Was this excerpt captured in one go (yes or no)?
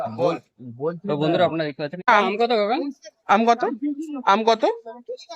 no